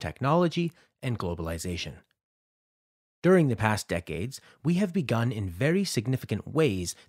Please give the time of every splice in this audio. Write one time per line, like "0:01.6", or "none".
0:01.9